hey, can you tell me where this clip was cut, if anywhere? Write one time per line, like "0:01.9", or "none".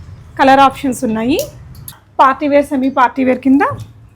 0:02.0